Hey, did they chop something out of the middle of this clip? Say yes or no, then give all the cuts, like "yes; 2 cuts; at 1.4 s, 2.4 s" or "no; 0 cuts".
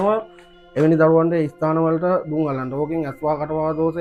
no; 0 cuts